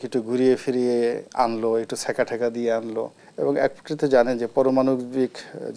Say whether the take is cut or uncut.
cut